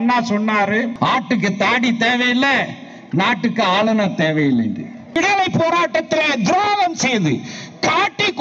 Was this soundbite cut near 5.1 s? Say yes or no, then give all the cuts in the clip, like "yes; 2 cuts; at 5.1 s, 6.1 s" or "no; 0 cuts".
yes; 2 cuts; at 0.9 s, 5.1 s